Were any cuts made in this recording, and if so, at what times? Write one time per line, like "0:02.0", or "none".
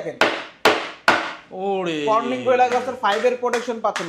none